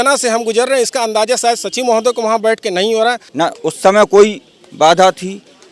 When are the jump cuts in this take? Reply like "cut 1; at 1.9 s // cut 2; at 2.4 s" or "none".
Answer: cut 1; at 3.2 s